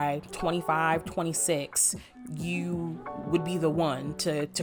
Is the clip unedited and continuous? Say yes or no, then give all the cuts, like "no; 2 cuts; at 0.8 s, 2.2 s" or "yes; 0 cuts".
yes; 0 cuts